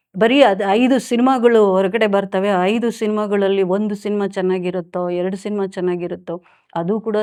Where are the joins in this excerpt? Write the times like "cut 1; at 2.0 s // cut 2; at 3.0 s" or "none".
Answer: none